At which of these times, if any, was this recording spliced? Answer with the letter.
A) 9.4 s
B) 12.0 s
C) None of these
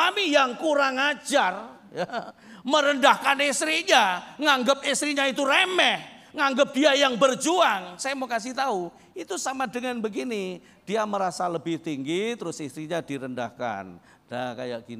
C